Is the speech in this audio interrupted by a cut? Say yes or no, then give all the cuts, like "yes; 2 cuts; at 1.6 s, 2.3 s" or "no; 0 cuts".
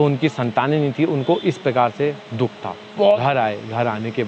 yes; 1 cut; at 3.2 s